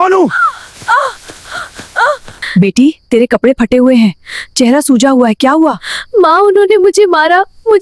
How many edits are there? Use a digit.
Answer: 1